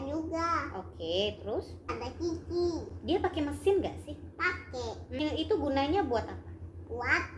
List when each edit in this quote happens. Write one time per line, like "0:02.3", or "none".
0:02.1
0:05.2

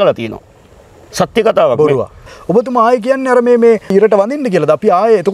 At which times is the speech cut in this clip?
0:02.3
0:03.9

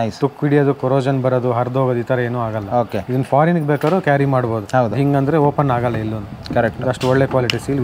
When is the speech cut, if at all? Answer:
none

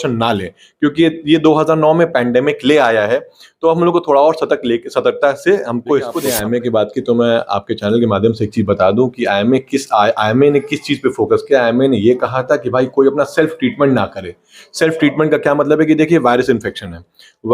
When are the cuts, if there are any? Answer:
0:06.2

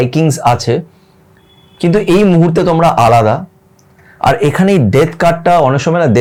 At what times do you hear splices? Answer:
none

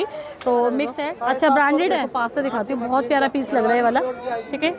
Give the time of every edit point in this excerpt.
0:01.0
0:02.1

